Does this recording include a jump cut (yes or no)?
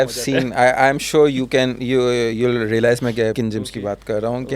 yes